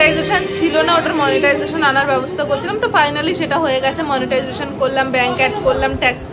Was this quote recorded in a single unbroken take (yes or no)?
yes